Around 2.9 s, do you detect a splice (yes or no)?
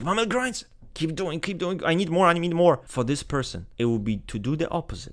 yes